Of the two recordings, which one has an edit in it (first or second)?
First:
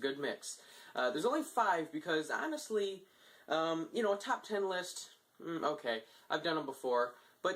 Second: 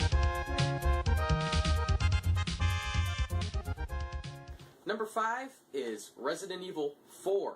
second